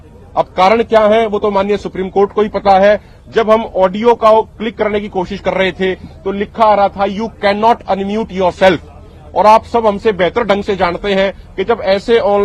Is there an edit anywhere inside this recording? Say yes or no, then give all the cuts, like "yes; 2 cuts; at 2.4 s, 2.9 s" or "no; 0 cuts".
no; 0 cuts